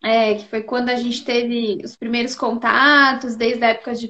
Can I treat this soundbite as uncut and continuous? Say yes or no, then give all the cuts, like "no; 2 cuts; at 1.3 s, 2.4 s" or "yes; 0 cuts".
no; 1 cut; at 2.2 s